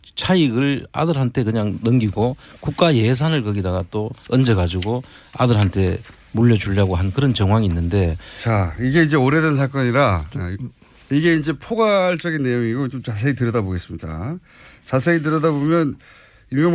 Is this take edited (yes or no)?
no